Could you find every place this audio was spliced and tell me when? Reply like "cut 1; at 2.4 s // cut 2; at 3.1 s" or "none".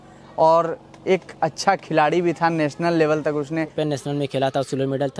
cut 1; at 3.8 s

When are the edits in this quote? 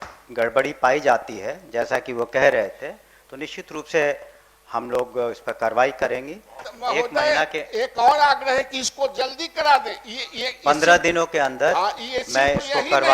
cut 1; at 6.6 s

